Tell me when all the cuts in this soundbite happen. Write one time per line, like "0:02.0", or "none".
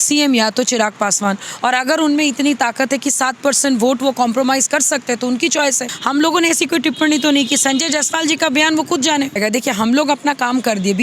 0:05.9
0:09.4